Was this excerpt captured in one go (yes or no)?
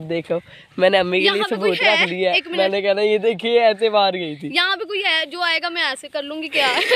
yes